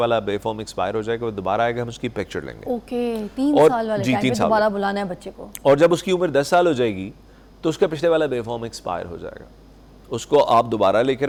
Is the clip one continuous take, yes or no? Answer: yes